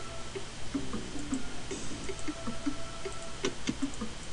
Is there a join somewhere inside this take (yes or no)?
yes